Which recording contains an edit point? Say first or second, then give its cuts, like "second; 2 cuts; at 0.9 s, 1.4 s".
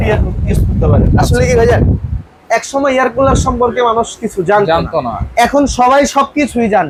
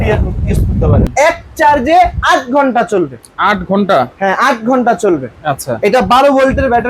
second; 1 cut; at 1.1 s